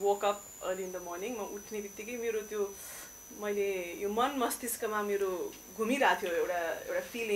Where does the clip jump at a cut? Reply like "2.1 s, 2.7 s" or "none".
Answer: none

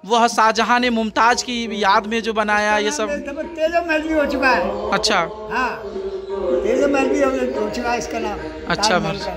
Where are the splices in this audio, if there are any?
none

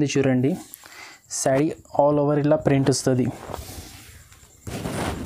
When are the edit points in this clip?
none

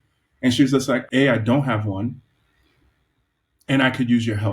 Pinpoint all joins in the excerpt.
1.1 s

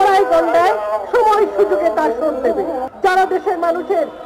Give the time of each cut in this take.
2.9 s

